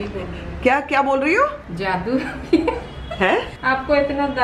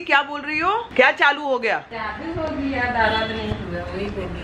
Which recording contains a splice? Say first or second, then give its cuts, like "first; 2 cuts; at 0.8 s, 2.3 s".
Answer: second; 2 cuts; at 0.9 s, 2.0 s